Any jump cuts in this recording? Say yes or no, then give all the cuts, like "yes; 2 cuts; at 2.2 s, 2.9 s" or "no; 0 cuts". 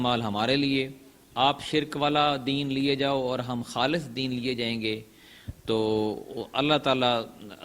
no; 0 cuts